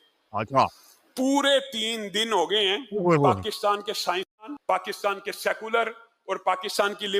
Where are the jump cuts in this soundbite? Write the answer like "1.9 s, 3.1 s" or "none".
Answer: 4.5 s